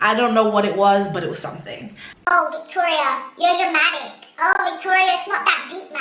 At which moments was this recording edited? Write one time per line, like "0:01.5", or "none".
0:02.3